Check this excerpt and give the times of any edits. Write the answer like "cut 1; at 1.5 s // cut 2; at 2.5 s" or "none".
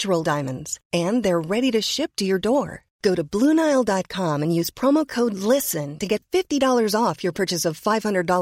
none